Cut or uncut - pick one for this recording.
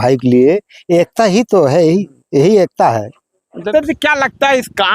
cut